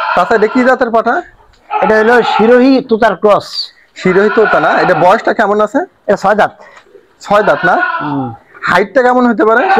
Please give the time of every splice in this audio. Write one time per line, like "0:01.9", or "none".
none